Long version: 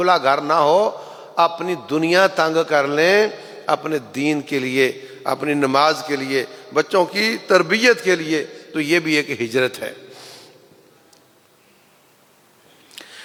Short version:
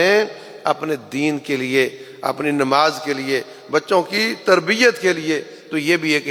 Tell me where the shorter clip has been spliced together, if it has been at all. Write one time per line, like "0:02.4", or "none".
none